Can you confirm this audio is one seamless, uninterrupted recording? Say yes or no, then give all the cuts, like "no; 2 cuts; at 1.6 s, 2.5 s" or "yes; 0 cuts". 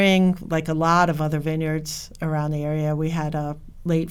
yes; 0 cuts